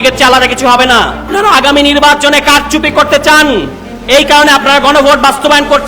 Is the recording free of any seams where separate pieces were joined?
no; 1 cut; at 1.3 s

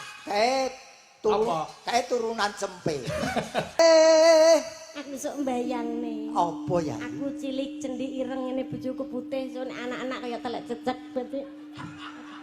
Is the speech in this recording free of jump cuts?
no; 1 cut; at 3.8 s

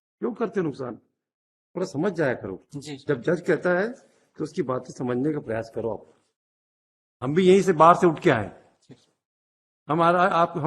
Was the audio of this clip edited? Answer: no; 0 cuts

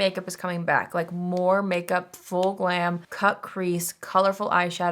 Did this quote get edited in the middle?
yes; 1 cut; at 3.1 s

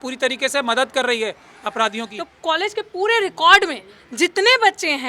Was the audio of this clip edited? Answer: yes; 1 cut; at 2.2 s

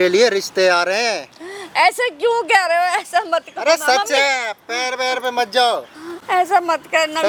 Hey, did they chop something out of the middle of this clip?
no; 0 cuts

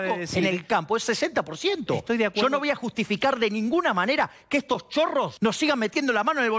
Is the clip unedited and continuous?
no; 1 cut; at 5.3 s

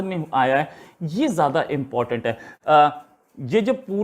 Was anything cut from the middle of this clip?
yes; 1 cut; at 2.5 s

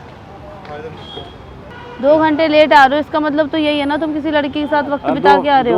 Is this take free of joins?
no; 1 cut; at 1.7 s

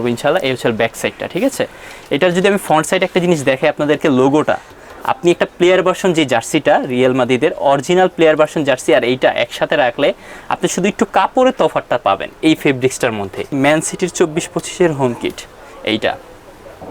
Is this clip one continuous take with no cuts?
no; 1 cut; at 13.5 s

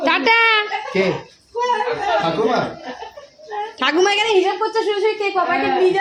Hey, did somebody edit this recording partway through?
no; 0 cuts

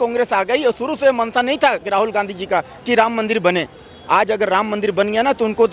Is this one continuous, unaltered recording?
yes; 0 cuts

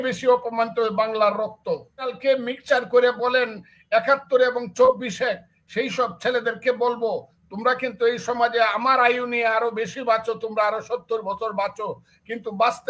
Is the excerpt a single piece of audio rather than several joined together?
no; 1 cut; at 2.1 s

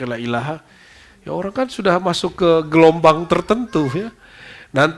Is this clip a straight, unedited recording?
yes; 0 cuts

